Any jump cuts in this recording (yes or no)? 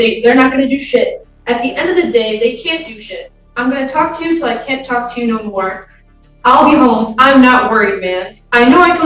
no